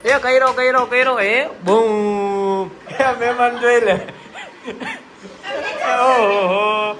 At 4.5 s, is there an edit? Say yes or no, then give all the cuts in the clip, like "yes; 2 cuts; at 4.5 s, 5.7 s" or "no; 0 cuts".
no; 1 cut; at 2.8 s